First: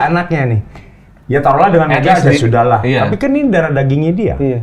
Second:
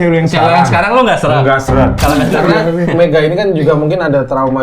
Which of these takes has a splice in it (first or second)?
second